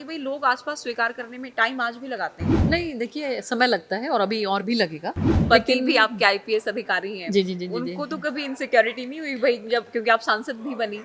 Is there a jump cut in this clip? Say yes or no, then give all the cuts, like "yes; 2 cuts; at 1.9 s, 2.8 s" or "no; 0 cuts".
yes; 2 cuts; at 2.5 s, 5.3 s